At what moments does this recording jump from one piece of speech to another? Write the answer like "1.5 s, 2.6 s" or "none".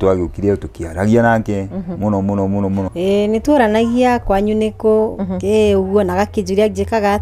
2.9 s